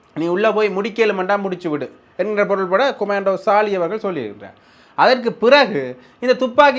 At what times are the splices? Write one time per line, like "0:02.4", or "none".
none